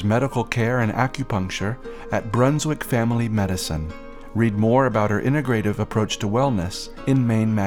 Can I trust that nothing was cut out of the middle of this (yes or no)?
yes